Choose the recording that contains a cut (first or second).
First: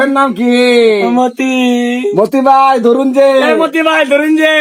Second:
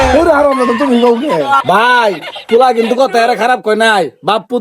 second